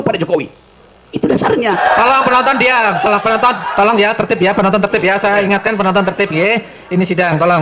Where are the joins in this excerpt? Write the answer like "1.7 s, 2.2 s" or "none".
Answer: 1.8 s